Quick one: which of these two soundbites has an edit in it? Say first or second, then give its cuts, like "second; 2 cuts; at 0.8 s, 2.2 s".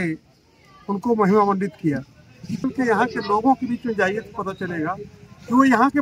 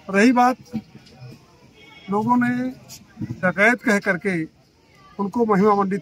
first; 1 cut; at 2.6 s